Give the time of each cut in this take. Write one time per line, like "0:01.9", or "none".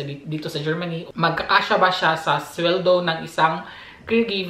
0:01.1